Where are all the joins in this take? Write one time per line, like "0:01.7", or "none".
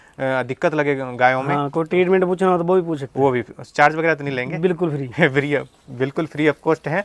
none